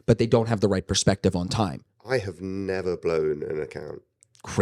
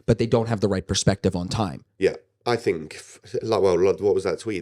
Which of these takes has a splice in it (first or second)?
first